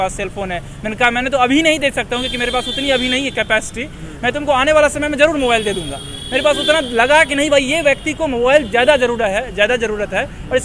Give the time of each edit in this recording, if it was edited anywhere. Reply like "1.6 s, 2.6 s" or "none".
none